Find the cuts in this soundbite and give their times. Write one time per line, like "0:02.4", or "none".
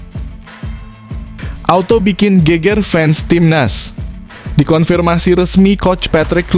0:01.3